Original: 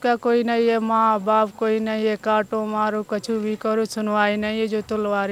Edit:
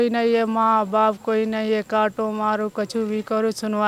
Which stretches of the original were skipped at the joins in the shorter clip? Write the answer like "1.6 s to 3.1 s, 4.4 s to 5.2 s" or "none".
none